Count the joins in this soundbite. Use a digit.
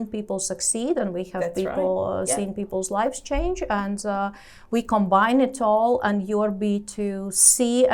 0